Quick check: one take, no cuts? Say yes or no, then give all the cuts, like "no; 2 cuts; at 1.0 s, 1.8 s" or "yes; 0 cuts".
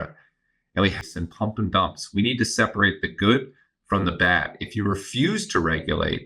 no; 1 cut; at 1.0 s